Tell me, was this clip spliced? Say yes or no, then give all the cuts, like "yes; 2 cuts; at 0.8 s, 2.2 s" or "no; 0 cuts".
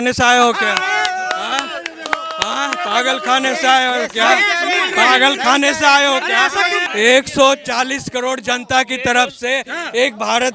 yes; 1 cut; at 6.8 s